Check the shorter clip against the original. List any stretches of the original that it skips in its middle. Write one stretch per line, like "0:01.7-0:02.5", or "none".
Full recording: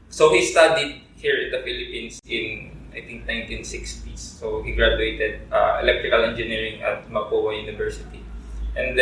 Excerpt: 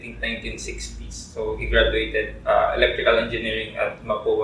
none